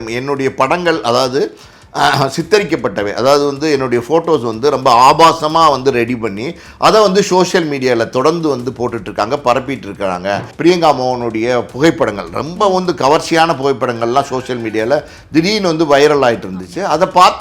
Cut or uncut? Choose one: cut